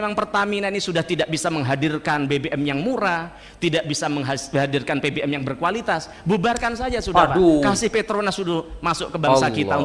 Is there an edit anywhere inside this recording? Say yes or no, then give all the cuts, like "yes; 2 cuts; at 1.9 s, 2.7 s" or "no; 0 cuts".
no; 0 cuts